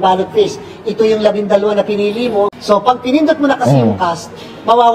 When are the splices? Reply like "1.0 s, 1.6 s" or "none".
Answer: 2.6 s